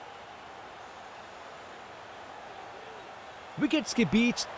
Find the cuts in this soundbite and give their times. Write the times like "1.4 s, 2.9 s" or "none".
1.1 s, 3.5 s